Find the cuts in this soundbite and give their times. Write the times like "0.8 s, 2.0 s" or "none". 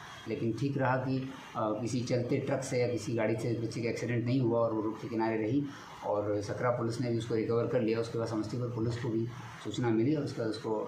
none